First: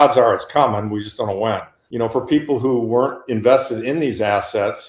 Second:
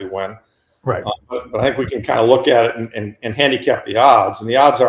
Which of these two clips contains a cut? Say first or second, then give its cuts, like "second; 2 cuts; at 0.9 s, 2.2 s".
first; 1 cut; at 1.8 s